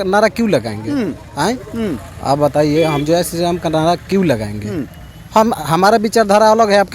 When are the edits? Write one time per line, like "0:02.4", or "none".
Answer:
none